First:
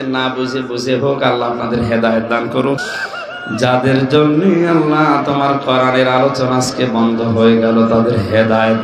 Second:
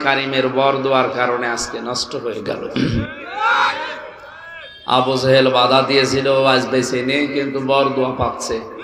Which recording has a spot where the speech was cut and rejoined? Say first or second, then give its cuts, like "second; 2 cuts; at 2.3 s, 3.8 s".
first; 1 cut; at 2.8 s